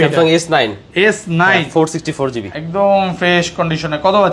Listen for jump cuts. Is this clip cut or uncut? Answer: uncut